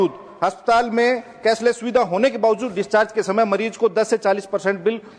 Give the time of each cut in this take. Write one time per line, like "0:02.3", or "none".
none